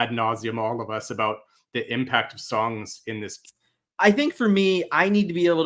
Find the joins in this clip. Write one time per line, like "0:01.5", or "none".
0:03.4

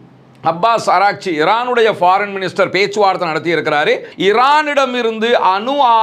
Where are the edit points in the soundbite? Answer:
0:04.1

